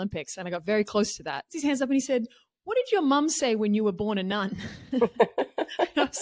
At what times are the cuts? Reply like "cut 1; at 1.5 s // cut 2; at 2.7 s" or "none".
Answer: cut 1; at 1.6 s